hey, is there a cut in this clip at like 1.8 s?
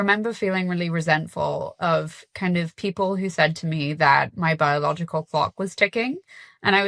no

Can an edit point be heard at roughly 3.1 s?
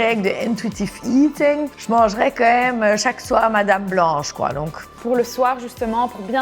no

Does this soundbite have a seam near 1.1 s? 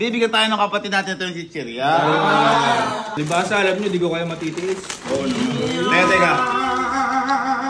no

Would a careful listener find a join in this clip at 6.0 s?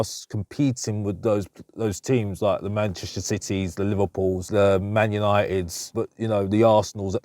yes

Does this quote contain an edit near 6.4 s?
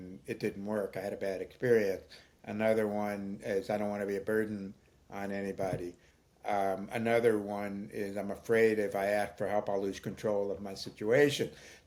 no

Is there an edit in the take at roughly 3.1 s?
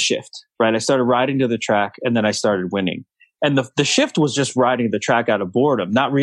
no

